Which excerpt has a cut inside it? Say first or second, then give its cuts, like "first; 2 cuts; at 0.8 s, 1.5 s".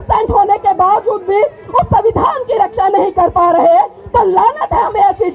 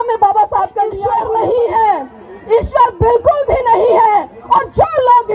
second; 1 cut; at 1.0 s